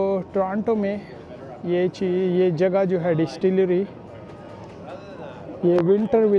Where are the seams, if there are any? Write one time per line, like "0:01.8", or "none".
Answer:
0:03.6